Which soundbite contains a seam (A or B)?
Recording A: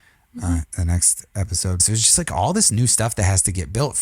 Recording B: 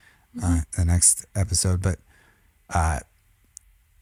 A